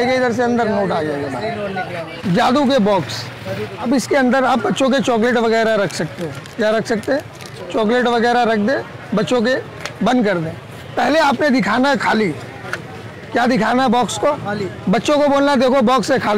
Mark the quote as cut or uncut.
cut